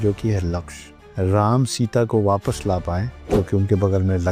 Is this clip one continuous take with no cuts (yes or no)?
no